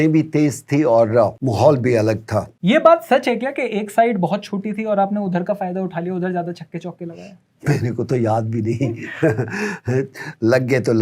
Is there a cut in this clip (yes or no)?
yes